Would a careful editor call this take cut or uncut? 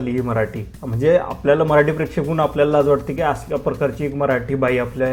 uncut